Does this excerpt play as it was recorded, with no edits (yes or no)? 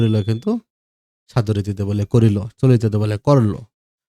yes